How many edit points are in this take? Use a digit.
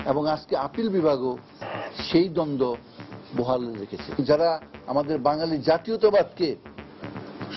1